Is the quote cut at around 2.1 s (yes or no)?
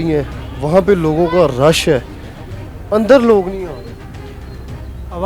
no